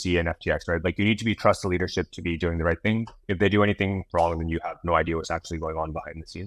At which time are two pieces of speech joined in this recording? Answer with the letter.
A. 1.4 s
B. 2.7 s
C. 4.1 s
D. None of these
D